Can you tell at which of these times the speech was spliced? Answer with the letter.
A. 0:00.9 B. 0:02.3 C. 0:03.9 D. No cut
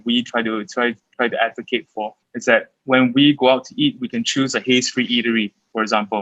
B